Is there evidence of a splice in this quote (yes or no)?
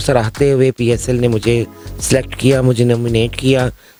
no